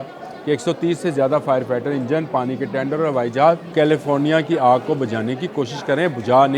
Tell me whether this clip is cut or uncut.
cut